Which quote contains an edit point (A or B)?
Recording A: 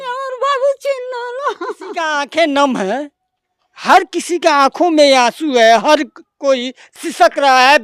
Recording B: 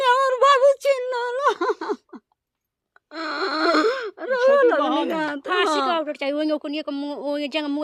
A